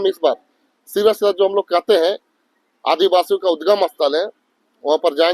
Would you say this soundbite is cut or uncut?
uncut